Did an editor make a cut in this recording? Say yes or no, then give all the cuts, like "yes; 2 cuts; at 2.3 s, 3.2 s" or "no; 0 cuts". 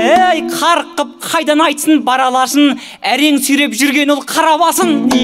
no; 0 cuts